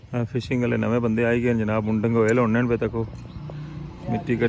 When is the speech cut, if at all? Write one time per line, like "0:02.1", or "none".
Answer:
none